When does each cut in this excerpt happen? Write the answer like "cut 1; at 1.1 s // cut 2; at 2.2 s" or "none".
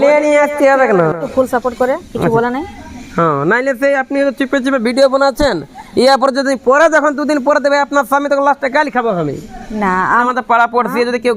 cut 1; at 1.2 s // cut 2; at 10.2 s